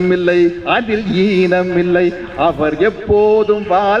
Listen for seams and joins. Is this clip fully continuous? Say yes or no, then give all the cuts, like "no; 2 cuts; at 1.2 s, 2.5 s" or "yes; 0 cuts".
yes; 0 cuts